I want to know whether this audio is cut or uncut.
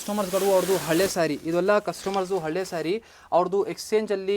uncut